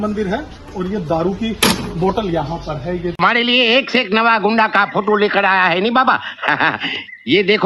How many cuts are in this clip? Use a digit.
1